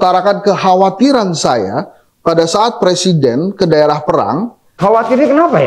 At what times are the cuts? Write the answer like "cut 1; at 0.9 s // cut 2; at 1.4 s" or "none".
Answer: cut 1; at 4.7 s